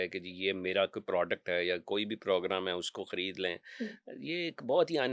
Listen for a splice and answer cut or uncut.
uncut